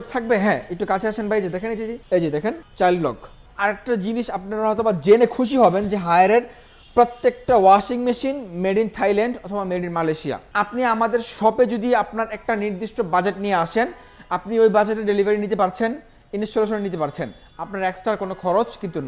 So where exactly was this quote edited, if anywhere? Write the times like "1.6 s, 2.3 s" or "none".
2.0 s, 2.6 s, 3.4 s, 10.4 s